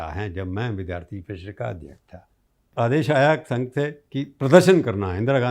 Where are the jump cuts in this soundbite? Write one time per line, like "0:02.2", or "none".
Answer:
0:02.7

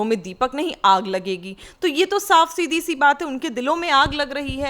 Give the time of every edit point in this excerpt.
none

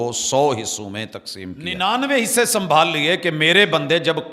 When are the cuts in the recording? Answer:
0:01.6

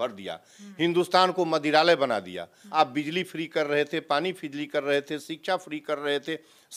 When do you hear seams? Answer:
0:02.6

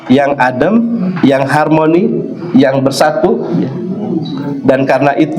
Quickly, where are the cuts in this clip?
none

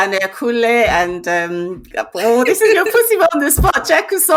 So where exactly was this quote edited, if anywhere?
none

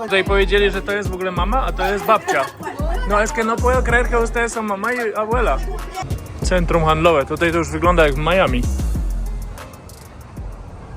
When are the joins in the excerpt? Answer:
0:06.0

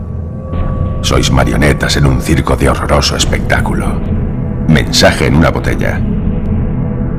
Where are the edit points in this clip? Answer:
none

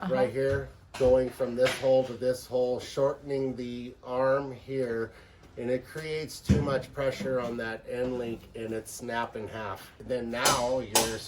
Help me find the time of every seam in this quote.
0:09.9

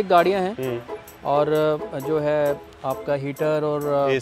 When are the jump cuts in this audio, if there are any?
none

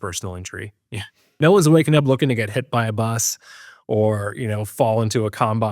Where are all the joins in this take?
0:01.2

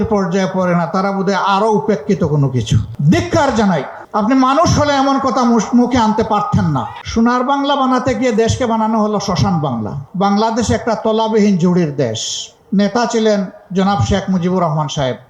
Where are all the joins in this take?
0:02.9
0:06.9
0:10.0
0:12.5

